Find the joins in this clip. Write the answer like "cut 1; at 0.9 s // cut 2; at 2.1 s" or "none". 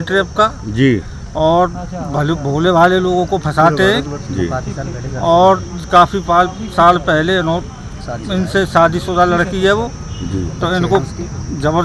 none